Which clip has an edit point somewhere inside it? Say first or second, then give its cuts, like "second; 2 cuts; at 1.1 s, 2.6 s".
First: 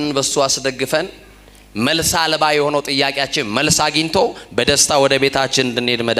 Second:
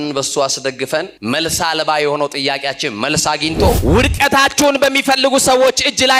second; 2 cuts; at 1.1 s, 3.8 s